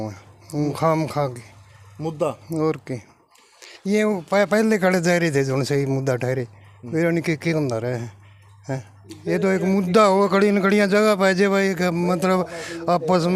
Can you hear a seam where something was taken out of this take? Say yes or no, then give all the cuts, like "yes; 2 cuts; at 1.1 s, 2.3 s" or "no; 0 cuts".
no; 0 cuts